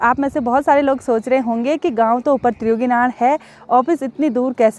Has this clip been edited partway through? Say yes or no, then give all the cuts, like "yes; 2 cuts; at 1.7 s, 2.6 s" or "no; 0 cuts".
no; 0 cuts